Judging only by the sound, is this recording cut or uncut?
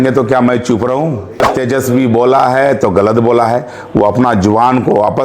cut